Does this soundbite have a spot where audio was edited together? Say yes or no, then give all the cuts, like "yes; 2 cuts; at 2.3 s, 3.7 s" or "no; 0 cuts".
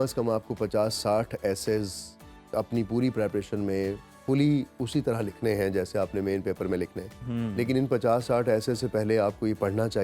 no; 0 cuts